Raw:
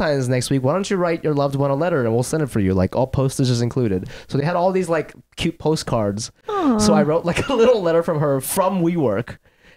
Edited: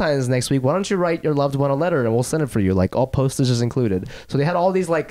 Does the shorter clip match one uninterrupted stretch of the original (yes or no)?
yes